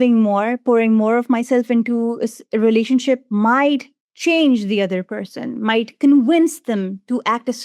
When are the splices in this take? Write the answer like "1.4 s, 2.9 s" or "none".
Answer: none